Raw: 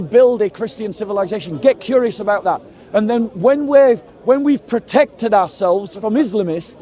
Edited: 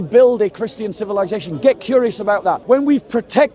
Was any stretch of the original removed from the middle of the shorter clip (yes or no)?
yes